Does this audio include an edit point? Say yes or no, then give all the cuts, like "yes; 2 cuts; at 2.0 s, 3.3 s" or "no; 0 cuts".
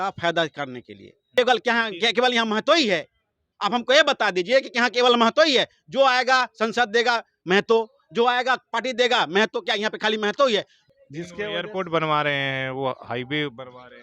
yes; 2 cuts; at 1.3 s, 10.8 s